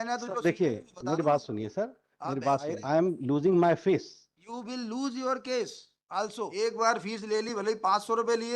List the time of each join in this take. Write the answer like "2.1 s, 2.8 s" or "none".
2.8 s, 6.5 s